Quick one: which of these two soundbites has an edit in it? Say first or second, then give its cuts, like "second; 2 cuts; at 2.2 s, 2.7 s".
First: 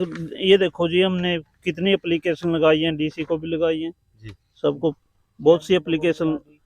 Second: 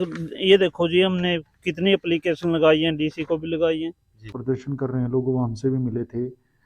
second; 1 cut; at 4.3 s